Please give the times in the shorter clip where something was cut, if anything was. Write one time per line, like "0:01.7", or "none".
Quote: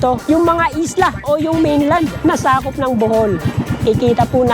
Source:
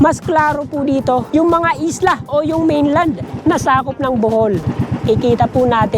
0:02.1